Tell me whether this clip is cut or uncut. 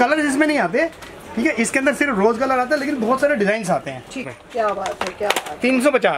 cut